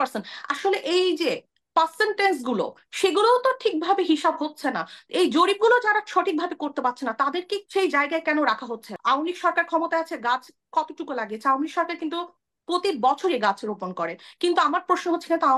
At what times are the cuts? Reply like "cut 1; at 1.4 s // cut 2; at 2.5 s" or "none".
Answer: cut 1; at 7.6 s // cut 2; at 8.9 s